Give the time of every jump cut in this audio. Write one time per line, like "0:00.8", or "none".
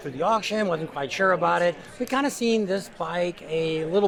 none